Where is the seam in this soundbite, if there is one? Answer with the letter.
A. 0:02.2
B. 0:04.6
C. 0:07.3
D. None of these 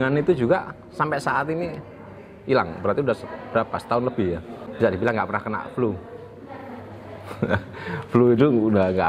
B